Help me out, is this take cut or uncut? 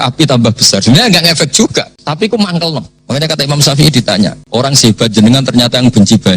cut